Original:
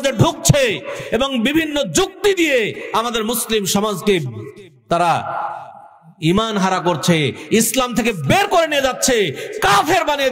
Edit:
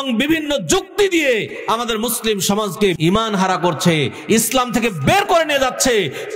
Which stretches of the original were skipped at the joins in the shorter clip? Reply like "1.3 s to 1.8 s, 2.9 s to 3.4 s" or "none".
4.2 s to 6.2 s